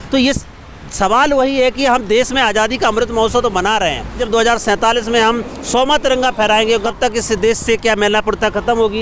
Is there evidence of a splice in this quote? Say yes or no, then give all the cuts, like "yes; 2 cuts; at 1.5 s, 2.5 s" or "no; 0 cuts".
yes; 2 cuts; at 4.2 s, 6.8 s